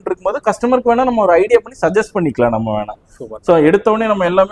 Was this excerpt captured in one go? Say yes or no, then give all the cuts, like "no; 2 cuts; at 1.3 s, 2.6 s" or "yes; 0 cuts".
yes; 0 cuts